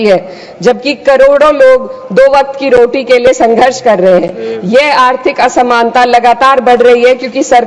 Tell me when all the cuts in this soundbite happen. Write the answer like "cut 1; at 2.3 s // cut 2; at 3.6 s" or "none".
none